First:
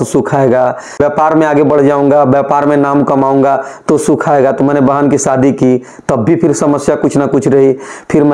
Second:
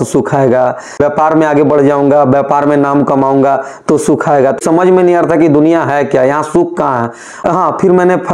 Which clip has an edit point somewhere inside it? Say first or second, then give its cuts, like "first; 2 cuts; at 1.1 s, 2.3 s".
second; 2 cuts; at 4.6 s, 7.4 s